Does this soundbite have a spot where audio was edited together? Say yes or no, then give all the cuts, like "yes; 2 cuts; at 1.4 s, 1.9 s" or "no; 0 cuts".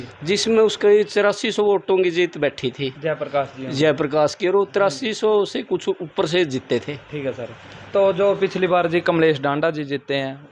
no; 0 cuts